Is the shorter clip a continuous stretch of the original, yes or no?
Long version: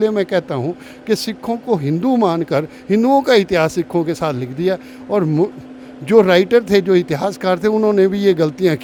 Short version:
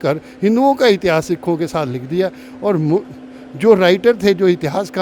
yes